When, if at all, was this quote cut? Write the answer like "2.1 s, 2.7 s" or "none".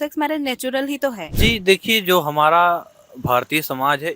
1.3 s